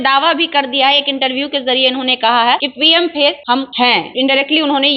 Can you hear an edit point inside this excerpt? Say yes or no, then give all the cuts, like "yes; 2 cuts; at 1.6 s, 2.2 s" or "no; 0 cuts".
yes; 2 cuts; at 2.7 s, 3.8 s